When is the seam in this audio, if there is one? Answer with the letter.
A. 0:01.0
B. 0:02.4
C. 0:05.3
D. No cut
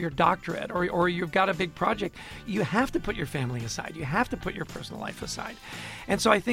B